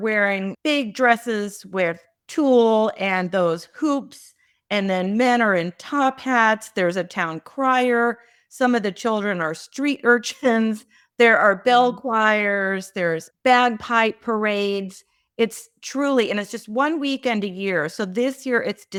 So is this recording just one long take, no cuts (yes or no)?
yes